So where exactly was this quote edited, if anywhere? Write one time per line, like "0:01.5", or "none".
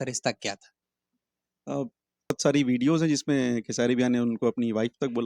0:02.3